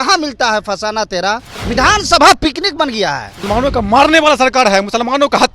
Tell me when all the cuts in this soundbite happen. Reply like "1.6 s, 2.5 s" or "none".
1.5 s, 3.3 s